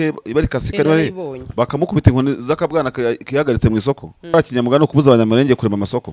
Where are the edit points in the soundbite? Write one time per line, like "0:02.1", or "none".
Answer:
0:04.3